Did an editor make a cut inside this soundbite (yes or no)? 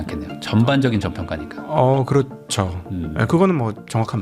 no